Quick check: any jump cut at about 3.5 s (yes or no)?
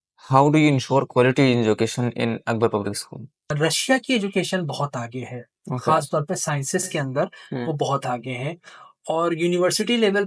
yes